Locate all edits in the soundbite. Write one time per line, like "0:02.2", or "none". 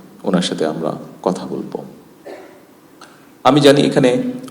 none